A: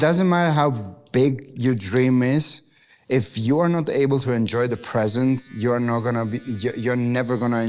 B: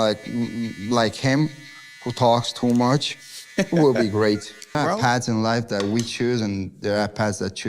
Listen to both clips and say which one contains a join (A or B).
B